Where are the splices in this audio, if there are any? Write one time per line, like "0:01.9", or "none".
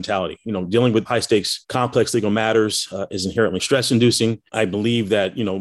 0:01.1
0:03.6